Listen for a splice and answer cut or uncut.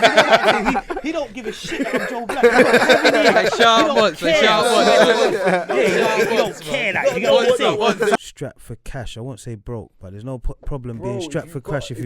cut